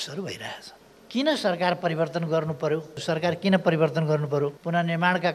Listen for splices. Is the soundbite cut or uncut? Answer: cut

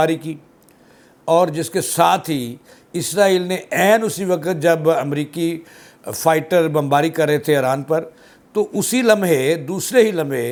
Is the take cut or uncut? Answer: uncut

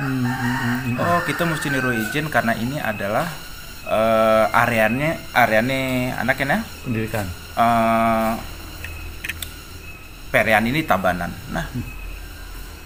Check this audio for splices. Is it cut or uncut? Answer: uncut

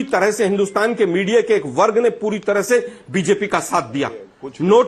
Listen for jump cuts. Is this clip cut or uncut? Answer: uncut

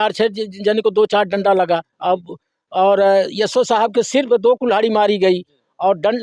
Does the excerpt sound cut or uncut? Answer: uncut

